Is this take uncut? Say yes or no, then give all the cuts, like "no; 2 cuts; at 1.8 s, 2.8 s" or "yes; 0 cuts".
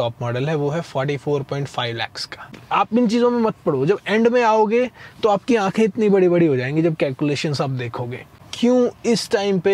no; 2 cuts; at 2.6 s, 8.4 s